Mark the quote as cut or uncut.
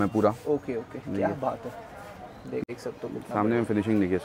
cut